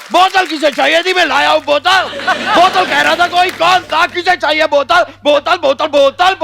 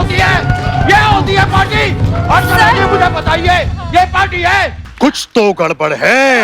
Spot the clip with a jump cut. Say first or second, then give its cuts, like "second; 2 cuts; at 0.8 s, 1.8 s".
second; 1 cut; at 4.8 s